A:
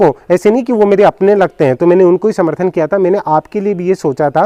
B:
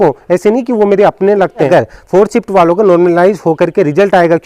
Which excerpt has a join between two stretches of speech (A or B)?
B